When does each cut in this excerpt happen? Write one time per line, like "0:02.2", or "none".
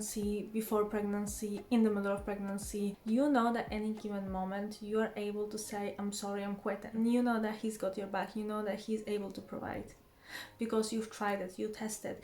0:03.0
0:07.0